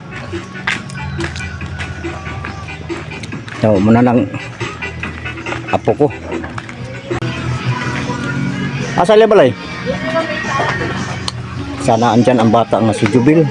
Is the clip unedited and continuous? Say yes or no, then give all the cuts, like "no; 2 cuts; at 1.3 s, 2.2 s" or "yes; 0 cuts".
no; 1 cut; at 7.2 s